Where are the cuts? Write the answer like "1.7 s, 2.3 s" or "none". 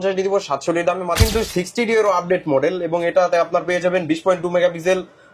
1.2 s